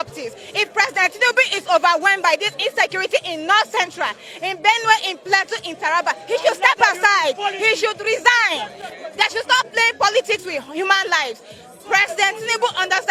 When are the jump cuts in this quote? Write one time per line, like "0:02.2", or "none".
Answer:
none